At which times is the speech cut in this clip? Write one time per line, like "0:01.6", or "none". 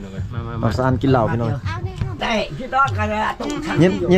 0:02.2